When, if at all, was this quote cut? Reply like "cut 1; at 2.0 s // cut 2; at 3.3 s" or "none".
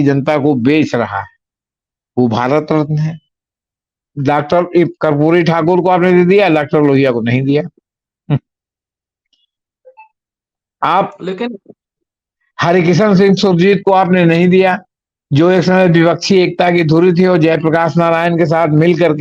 cut 1; at 4.1 s